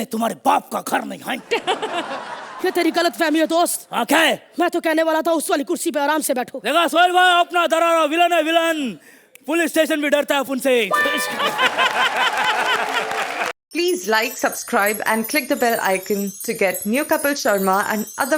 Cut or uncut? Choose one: cut